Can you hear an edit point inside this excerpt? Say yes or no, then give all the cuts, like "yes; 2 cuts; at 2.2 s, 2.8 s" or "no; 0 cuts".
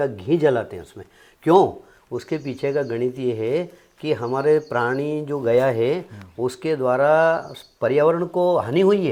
no; 0 cuts